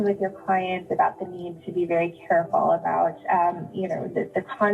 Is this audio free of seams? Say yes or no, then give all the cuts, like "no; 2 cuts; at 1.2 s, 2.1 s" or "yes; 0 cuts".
yes; 0 cuts